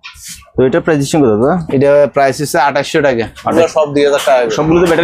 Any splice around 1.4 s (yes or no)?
no